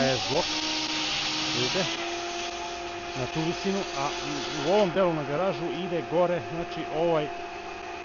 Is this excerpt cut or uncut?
uncut